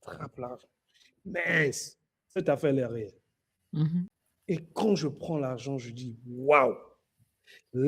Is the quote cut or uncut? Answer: cut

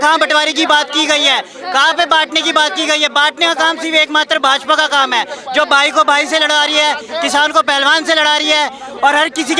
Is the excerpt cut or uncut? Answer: uncut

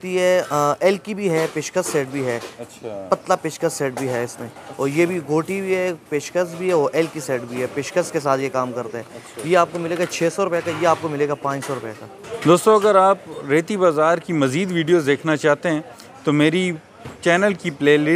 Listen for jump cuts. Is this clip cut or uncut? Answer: uncut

